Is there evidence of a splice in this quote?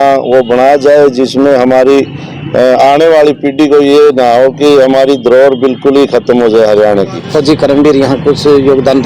yes; 1 cut; at 7.2 s

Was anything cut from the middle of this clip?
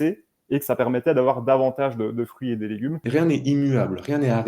yes; 1 cut; at 3.0 s

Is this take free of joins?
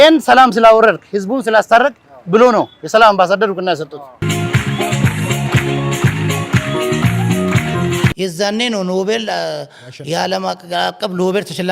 no; 2 cuts; at 4.2 s, 8.1 s

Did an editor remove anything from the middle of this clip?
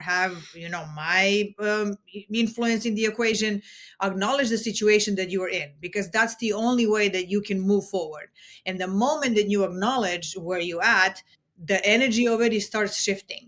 no; 0 cuts

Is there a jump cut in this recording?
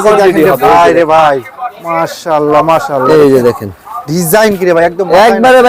no; 0 cuts

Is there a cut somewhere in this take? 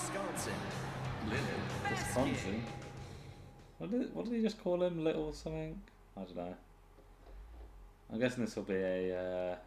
yes; 1 cut; at 1.5 s

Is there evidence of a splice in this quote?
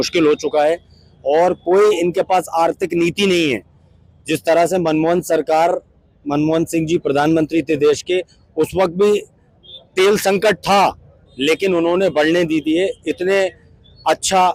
no; 0 cuts

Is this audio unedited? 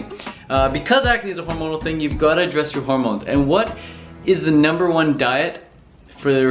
yes; 0 cuts

